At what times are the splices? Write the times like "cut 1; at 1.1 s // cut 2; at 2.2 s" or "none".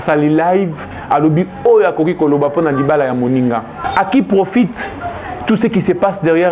cut 1; at 3.8 s

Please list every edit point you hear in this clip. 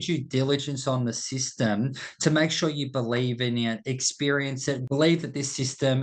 cut 1; at 4.8 s

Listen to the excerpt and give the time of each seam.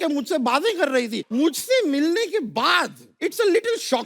cut 1; at 1.3 s // cut 2; at 3.2 s

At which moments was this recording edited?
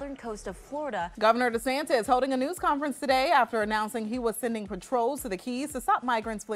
none

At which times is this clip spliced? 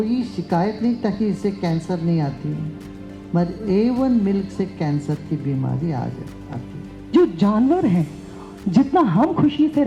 cut 1; at 7.1 s

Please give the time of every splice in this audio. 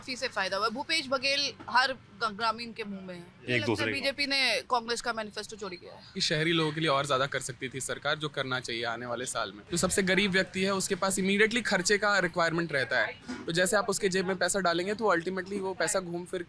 cut 1; at 3.4 s // cut 2; at 6.2 s // cut 3; at 9.6 s

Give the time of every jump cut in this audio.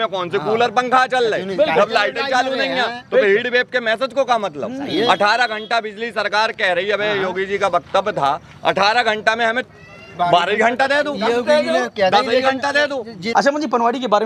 cut 1; at 13.2 s

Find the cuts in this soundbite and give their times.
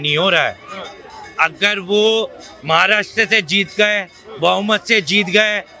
none

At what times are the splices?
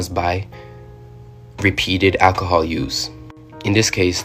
none

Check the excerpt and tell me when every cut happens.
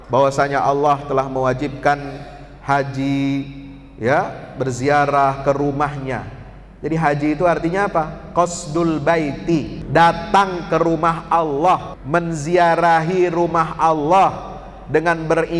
cut 1; at 9.8 s // cut 2; at 11.9 s

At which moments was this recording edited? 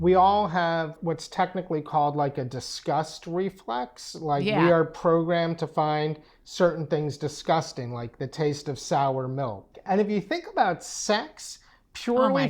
cut 1; at 1.0 s // cut 2; at 9.8 s

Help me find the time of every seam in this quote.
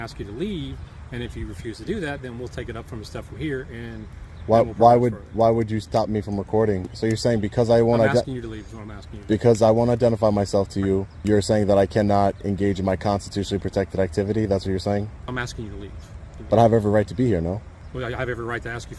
cut 1; at 6.9 s // cut 2; at 11.1 s // cut 3; at 15.3 s // cut 4; at 16.4 s // cut 5; at 17.8 s

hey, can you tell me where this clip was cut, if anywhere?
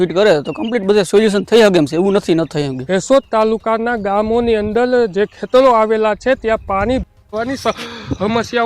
cut 1; at 2.8 s

